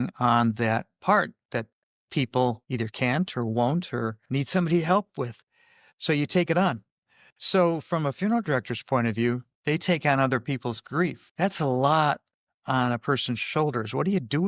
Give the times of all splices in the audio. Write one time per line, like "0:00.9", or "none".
0:09.5